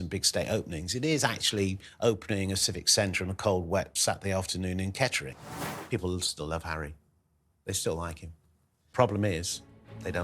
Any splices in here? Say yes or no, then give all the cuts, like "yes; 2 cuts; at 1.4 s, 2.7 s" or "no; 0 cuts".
yes; 2 cuts; at 5.5 s, 8.7 s